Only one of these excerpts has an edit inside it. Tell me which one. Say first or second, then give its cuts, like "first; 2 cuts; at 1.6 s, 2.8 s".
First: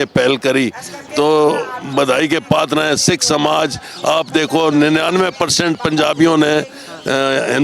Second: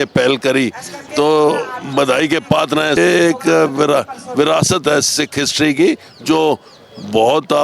second; 1 cut; at 3.0 s